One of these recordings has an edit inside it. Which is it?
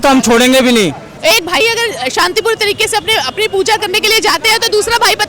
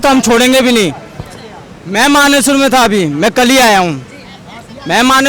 first; 1 cut; at 1.1 s

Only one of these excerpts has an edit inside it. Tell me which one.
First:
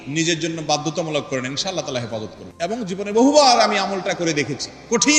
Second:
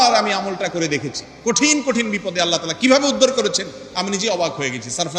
first; 1 cut; at 2.4 s

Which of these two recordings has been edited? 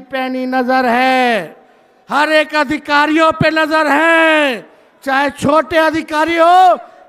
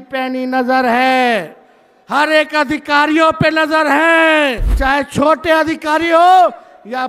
second; 1 cut; at 4.7 s

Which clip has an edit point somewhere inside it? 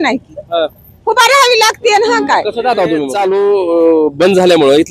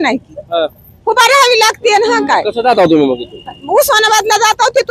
first; 1 cut; at 3.1 s

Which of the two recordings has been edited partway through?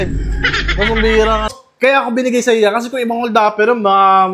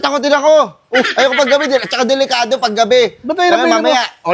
first; 1 cut; at 1.5 s

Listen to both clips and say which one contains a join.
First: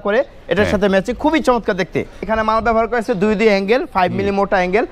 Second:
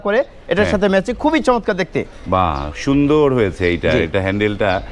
first; 1 cut; at 2.2 s

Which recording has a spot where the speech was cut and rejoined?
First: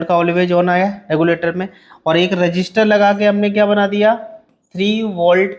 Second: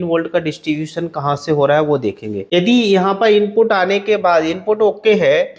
second; 1 cut; at 2.4 s

